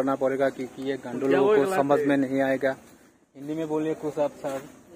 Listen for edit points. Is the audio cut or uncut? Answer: uncut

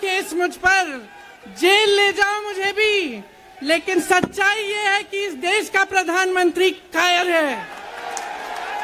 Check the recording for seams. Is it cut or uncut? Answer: uncut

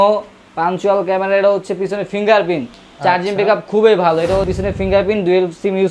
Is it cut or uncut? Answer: cut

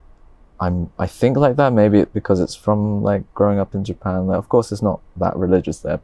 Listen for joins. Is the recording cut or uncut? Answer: uncut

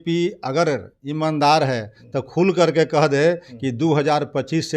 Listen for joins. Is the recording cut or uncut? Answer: uncut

